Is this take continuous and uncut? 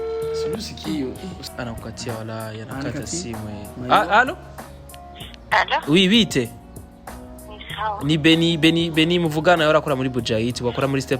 no; 1 cut; at 1.4 s

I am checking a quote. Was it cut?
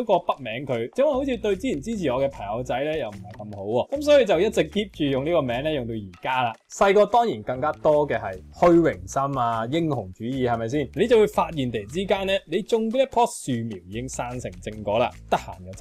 yes; 2 cuts; at 6.6 s, 10.9 s

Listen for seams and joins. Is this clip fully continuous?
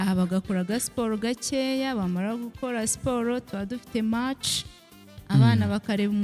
yes; 0 cuts

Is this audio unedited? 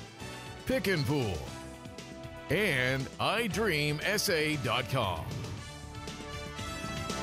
yes; 0 cuts

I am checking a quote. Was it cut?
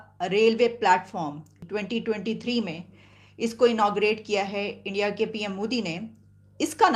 yes; 1 cut; at 1.6 s

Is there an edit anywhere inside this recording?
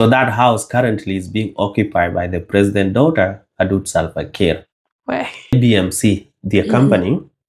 yes; 1 cut; at 5.5 s

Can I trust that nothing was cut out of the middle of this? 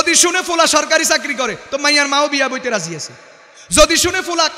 yes; 0 cuts

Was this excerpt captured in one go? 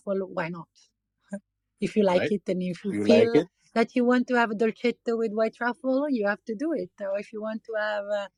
yes; 0 cuts

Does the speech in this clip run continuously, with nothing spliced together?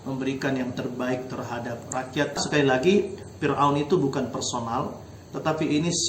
no; 1 cut; at 2.4 s

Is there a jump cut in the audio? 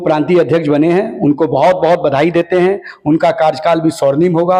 no; 0 cuts

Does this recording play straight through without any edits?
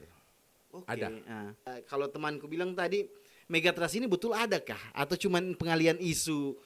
no; 1 cut; at 1.7 s

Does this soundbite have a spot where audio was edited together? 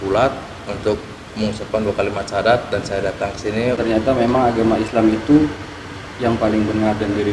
yes; 1 cut; at 3.8 s

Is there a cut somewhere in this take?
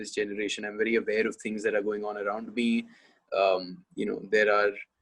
no; 0 cuts

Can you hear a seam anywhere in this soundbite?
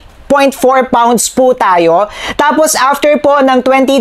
no; 0 cuts

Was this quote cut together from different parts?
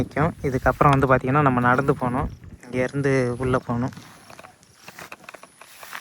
no; 0 cuts

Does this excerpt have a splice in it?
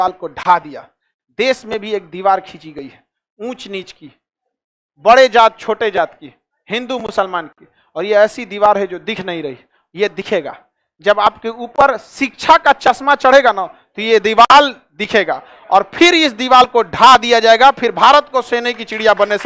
no; 0 cuts

